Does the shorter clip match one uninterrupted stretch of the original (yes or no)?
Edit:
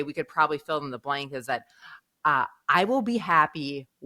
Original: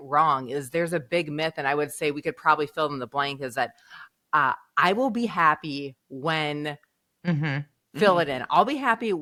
yes